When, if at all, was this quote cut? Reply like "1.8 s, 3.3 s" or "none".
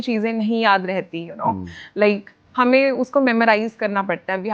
none